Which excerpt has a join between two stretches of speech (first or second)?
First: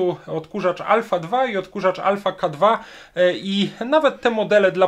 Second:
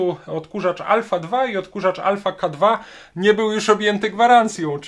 second